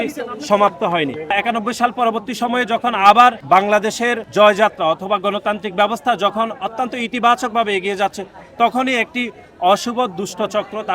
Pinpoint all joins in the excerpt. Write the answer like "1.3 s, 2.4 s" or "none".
1.3 s